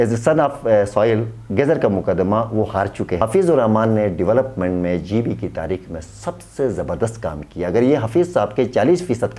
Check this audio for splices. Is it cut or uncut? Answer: cut